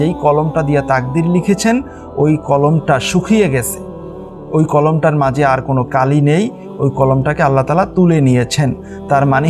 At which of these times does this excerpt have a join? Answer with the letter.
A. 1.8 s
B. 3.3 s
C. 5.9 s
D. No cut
C